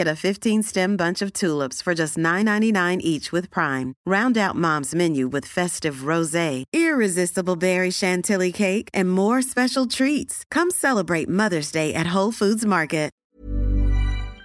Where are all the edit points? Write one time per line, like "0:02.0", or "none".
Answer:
0:13.2

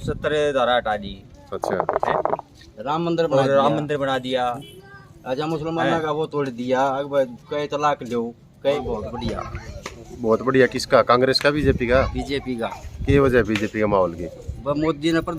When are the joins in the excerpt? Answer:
0:08.8

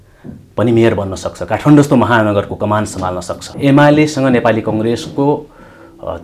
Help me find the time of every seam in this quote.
0:03.4

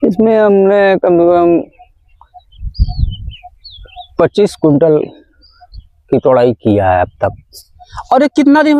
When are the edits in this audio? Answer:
none

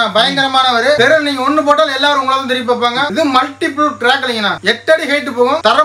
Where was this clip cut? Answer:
0:01.0
0:03.1

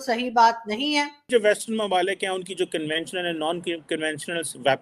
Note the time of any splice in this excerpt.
0:01.3

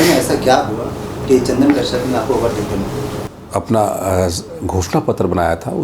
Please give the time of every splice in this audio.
0:03.3

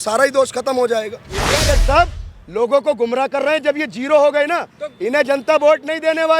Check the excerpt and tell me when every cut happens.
0:01.7

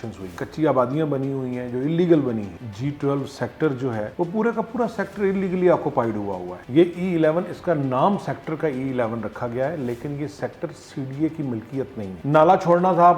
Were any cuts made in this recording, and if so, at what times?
0:02.6
0:06.5
0:12.1

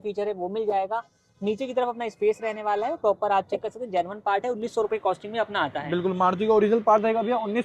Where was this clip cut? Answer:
none

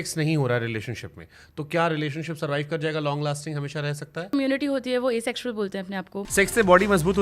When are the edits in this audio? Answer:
0:04.3
0:06.2

